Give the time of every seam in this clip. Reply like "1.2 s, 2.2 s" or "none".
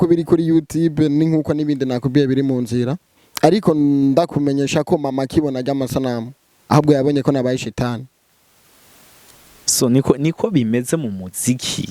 none